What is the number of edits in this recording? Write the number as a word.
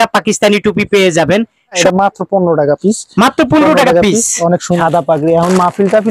two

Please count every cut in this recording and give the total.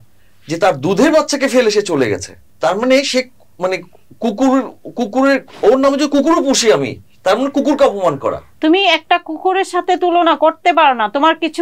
one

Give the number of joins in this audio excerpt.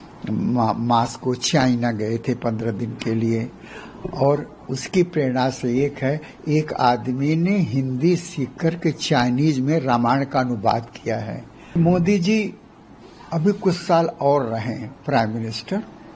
one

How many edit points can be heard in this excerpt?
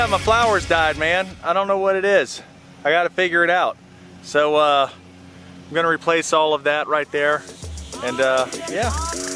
zero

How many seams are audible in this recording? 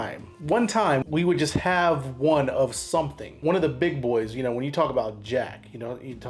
two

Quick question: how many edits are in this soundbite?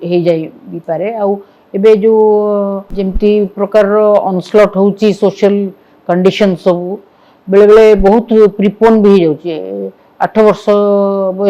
zero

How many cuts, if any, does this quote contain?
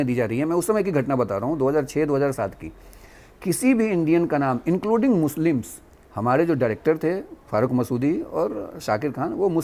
zero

